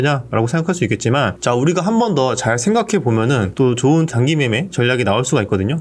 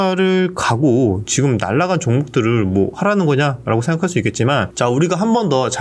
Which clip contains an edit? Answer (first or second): first